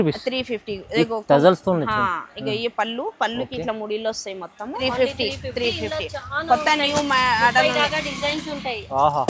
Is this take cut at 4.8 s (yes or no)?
yes